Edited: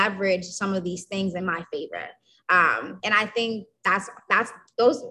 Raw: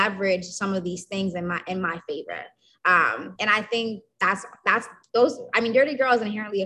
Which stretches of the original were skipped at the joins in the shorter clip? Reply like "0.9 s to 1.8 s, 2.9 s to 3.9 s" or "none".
1.4 s to 1.8 s